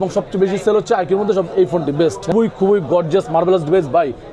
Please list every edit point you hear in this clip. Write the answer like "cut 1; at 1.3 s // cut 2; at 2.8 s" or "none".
cut 1; at 2.3 s